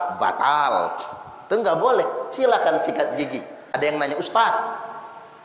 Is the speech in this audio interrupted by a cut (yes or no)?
yes